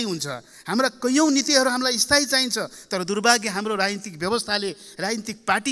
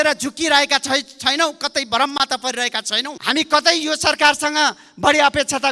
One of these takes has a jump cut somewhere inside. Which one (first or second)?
second